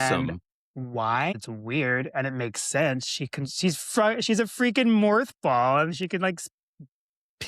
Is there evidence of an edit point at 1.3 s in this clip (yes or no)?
yes